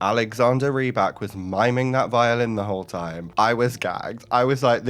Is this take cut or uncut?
uncut